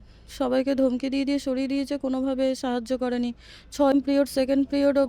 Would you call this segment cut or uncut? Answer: cut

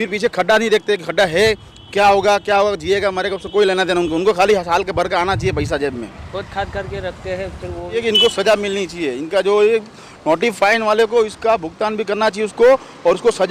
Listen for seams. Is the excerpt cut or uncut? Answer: uncut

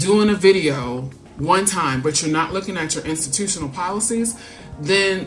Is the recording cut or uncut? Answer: uncut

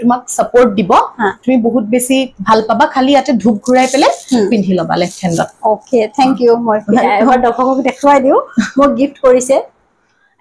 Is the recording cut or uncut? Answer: uncut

